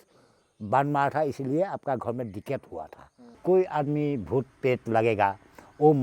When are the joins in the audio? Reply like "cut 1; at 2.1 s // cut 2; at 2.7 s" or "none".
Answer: cut 1; at 3.4 s